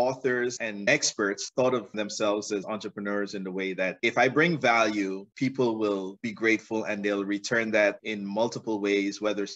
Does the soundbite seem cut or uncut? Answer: uncut